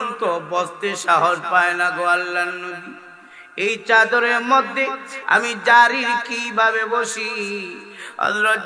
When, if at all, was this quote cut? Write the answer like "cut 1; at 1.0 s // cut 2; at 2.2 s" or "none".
none